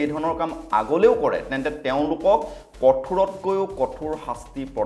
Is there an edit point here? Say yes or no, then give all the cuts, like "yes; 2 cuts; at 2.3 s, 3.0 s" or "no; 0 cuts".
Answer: no; 0 cuts